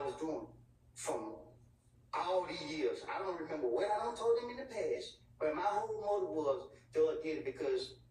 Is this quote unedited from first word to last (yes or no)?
yes